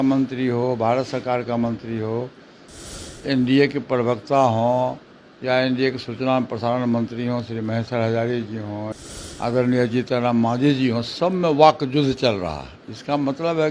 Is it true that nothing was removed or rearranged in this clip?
no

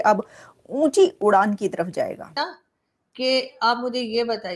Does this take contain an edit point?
yes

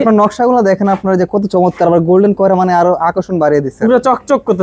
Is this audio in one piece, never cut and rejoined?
yes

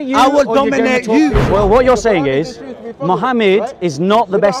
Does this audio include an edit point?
yes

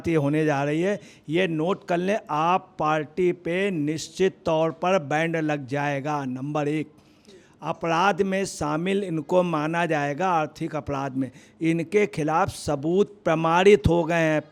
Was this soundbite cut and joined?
no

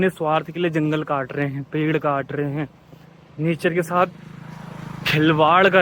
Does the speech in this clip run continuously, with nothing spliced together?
yes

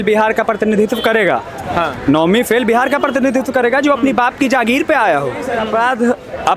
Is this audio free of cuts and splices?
no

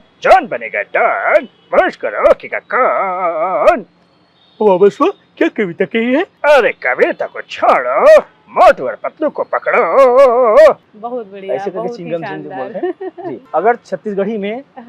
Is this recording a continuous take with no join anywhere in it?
no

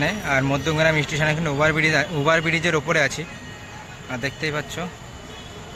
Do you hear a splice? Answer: no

